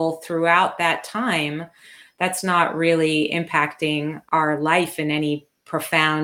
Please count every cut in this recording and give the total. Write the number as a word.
one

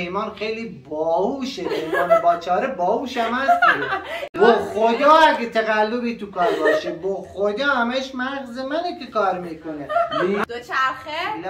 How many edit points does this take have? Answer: two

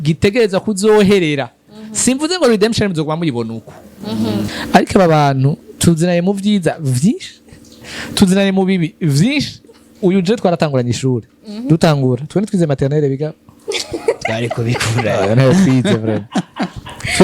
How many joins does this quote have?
one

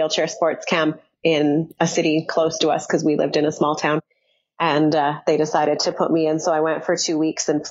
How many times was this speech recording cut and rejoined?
one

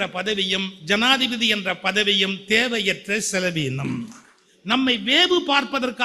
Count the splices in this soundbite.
one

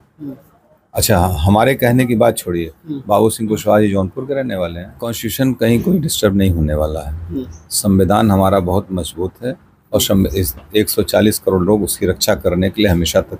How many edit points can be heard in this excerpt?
one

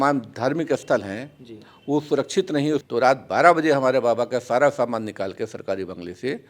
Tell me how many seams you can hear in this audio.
one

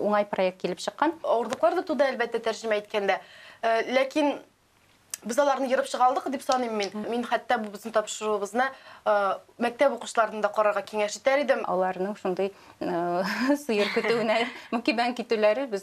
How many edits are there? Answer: three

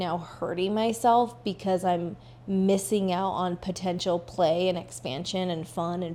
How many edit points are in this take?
zero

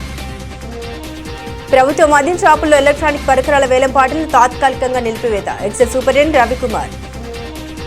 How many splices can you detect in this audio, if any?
two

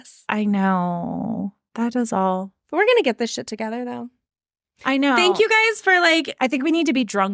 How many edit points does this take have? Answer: zero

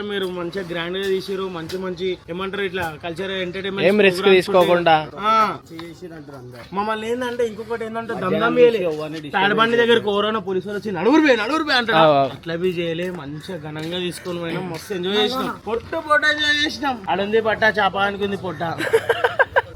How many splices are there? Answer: zero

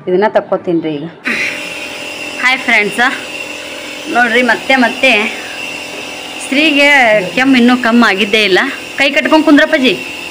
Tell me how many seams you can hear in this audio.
one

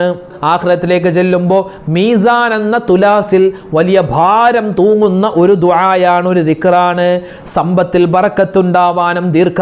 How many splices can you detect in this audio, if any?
one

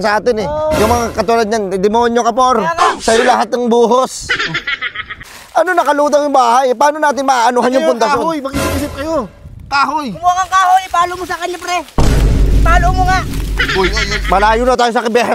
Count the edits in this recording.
one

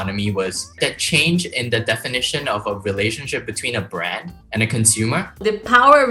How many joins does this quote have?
three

